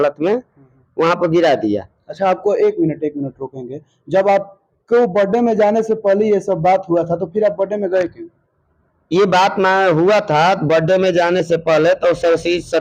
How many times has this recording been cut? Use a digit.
0